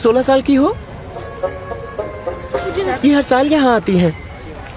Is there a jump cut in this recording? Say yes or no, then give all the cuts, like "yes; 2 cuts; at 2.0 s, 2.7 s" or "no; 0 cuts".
no; 0 cuts